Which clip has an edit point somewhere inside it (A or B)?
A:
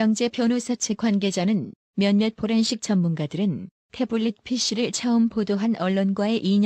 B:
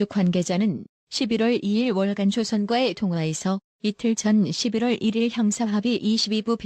B